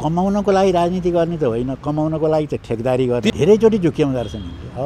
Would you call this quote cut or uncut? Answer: cut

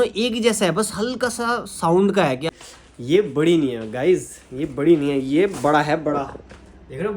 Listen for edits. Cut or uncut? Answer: cut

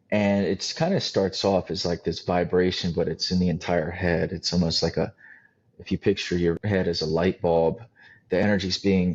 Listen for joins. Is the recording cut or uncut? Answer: cut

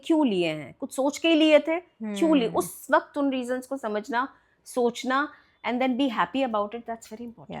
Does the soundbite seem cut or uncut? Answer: uncut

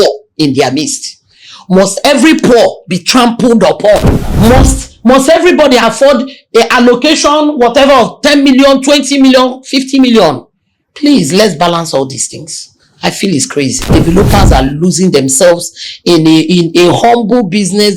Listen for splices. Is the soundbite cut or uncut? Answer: cut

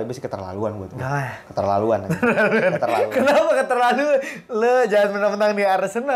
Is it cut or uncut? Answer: uncut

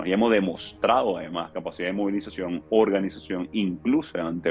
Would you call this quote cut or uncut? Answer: uncut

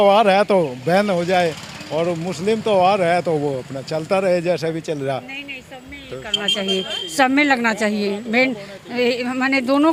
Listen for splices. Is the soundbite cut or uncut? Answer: uncut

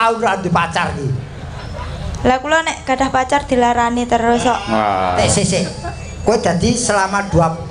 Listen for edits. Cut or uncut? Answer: cut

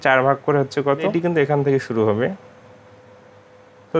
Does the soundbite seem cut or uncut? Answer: cut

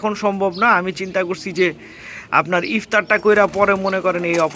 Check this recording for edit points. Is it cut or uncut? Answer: uncut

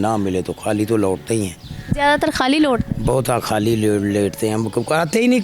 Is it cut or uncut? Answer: uncut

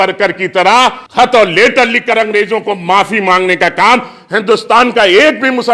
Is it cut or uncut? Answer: cut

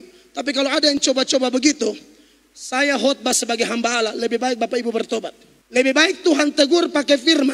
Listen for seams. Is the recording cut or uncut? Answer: uncut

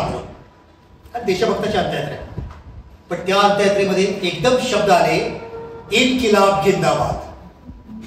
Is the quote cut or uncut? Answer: uncut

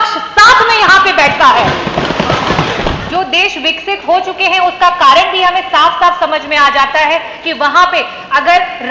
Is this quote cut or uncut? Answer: cut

